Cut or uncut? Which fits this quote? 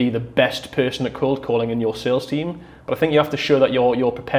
uncut